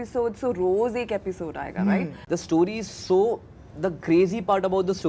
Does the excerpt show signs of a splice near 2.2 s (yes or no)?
yes